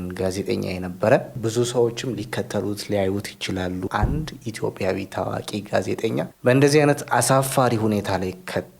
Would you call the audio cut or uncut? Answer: cut